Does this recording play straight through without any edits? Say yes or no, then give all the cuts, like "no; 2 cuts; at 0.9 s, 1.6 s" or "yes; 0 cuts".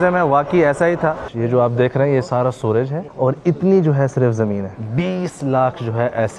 no; 3 cuts; at 1.3 s, 3.0 s, 4.7 s